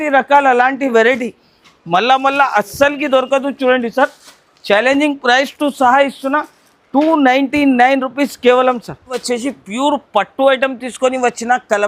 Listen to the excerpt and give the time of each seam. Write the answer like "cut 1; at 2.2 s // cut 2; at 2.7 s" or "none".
none